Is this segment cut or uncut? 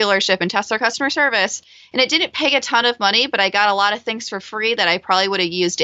uncut